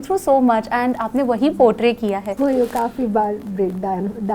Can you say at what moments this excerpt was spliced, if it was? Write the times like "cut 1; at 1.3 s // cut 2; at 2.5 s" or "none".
cut 1; at 2.3 s